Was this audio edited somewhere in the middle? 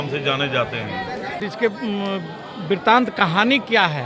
yes; 1 cut; at 1.4 s

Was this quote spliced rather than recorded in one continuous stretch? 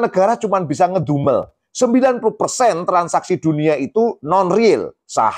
yes; 1 cut; at 1.6 s

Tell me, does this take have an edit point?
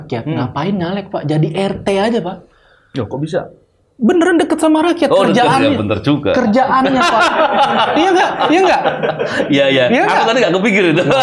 no; 0 cuts

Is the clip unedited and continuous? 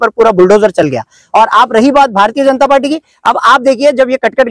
yes; 0 cuts

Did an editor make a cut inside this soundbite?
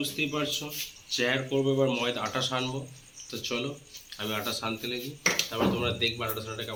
no; 0 cuts

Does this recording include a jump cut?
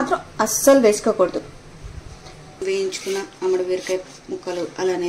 yes; 1 cut; at 2.6 s

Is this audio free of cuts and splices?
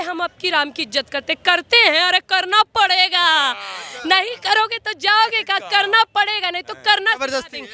yes; 0 cuts

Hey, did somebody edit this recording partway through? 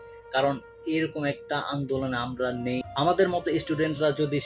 yes; 1 cut; at 2.8 s

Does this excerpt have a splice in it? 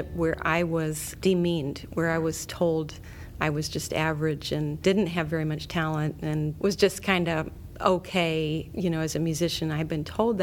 yes; 4 cuts; at 1.1 s, 4.8 s, 6.5 s, 8.7 s

